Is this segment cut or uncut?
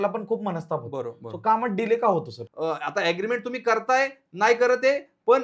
cut